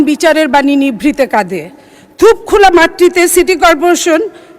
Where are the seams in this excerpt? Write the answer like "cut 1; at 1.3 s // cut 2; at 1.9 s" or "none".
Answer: none